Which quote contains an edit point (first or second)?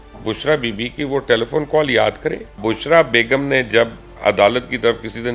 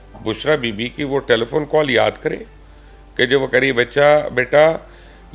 first